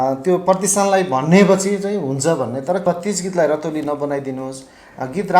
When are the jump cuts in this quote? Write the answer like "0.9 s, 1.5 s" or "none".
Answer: 2.8 s